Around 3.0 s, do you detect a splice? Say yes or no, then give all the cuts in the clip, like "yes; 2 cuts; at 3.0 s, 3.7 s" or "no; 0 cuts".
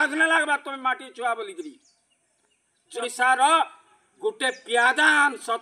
yes; 1 cut; at 3.0 s